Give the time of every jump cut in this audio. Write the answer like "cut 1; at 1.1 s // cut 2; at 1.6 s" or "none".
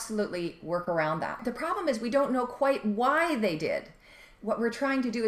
cut 1; at 1.4 s